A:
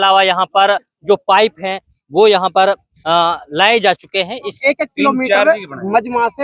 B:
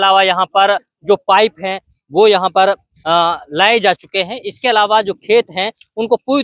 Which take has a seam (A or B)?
A